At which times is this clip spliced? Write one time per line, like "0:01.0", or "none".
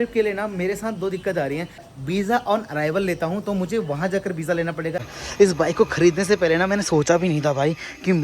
0:01.8
0:05.1